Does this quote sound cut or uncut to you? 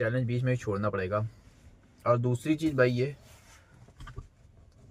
uncut